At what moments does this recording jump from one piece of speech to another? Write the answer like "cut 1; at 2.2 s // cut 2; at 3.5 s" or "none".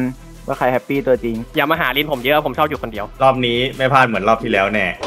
cut 1; at 1.4 s // cut 2; at 3.0 s